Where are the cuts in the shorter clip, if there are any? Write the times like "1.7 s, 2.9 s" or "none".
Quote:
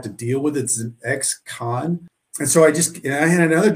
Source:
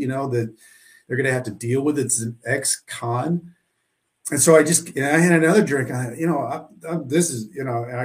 2.2 s